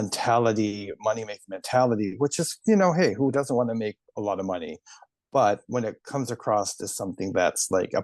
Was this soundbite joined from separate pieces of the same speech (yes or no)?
no